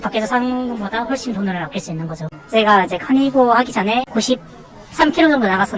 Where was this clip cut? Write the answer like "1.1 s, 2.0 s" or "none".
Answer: 2.2 s

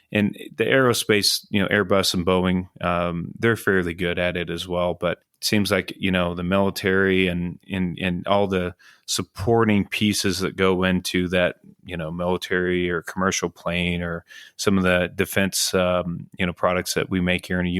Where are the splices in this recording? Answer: 5.3 s, 7.6 s

